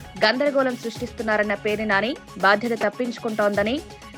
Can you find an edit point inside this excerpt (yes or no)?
no